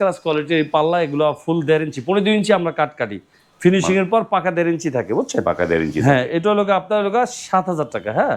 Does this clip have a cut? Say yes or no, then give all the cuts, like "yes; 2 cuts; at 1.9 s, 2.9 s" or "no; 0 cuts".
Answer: no; 0 cuts